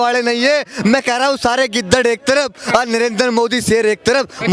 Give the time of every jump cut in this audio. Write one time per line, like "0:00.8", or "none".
none